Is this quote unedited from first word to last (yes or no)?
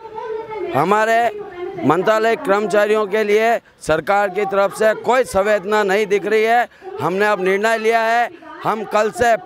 yes